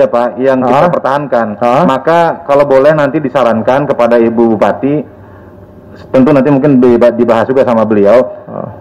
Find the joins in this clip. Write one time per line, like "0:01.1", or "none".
none